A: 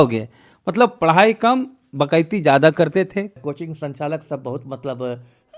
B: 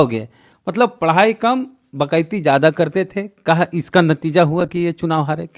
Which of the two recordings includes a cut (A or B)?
A